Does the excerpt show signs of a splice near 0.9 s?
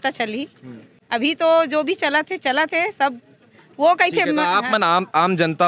no; 0 cuts

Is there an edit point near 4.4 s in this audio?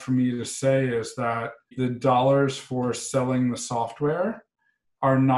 no; 0 cuts

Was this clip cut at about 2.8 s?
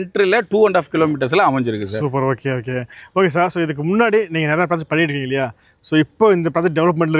no; 0 cuts

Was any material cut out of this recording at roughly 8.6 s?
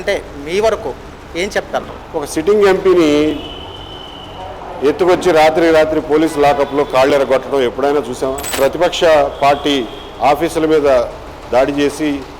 yes; 2 cuts; at 2.0 s, 8.6 s

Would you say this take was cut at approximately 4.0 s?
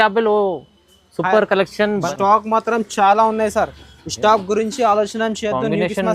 no; 1 cut; at 2.1 s

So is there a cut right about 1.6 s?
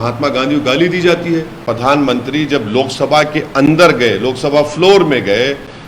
yes; 1 cut; at 1.6 s

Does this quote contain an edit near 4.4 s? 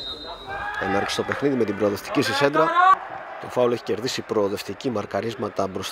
no; 1 cut; at 2.9 s

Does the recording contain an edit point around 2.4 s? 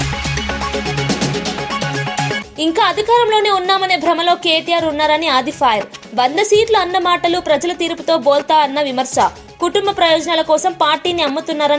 yes; 1 cut; at 2.4 s

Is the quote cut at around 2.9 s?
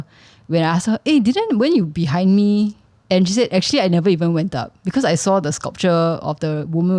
yes; 1 cut; at 2.9 s

